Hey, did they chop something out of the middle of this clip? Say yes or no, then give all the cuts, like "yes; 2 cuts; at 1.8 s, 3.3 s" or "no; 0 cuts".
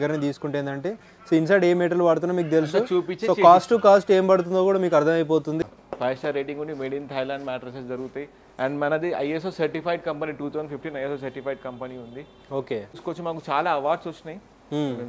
yes; 2 cuts; at 5.6 s, 13.0 s